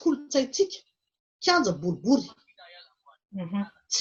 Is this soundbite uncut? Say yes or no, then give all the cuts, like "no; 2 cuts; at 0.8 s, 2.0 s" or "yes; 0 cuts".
yes; 0 cuts